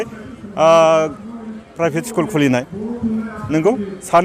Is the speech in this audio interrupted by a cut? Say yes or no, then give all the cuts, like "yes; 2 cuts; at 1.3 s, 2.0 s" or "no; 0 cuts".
no; 0 cuts